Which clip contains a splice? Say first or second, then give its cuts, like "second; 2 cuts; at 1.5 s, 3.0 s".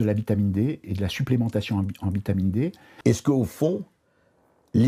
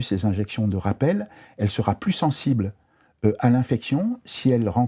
first; 1 cut; at 2.9 s